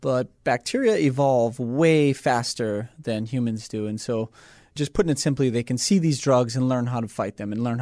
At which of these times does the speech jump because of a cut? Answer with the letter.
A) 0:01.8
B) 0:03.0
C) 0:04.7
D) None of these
C